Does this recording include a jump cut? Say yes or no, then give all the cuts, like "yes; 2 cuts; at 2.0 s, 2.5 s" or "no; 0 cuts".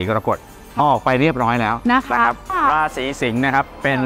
yes; 1 cut; at 2.5 s